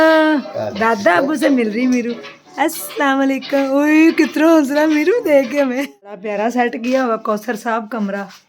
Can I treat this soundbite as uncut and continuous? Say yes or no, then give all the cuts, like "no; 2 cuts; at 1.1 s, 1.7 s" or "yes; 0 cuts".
no; 1 cut; at 5.9 s